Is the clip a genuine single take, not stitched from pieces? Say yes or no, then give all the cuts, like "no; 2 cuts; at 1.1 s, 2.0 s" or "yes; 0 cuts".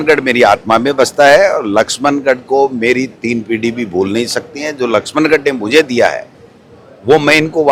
yes; 0 cuts